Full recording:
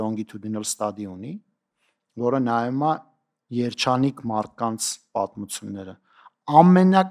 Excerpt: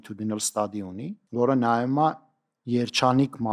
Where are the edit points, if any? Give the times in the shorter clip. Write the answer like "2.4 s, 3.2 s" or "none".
1.2 s